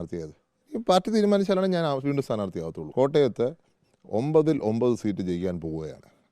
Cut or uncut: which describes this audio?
cut